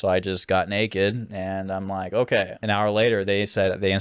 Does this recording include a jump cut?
yes; 1 cut; at 2.6 s

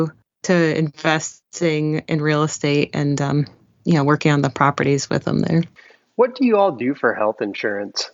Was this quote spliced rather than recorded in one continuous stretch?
no; 0 cuts

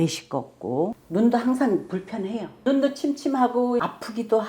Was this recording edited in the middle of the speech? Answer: yes; 2 cuts; at 1.0 s, 2.5 s

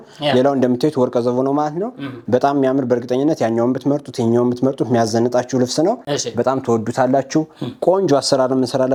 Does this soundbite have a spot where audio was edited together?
no; 0 cuts

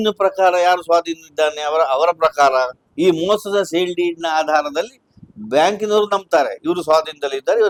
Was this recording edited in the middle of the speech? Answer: no; 0 cuts

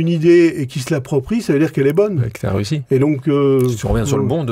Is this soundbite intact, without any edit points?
yes; 0 cuts

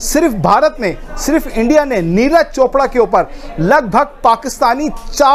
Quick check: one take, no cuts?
yes; 0 cuts

